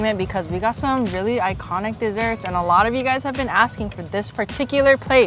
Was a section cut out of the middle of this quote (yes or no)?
no